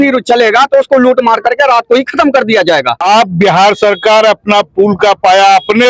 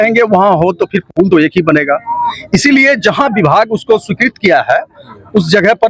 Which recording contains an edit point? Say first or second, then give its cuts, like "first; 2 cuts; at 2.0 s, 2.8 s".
first; 1 cut; at 2.9 s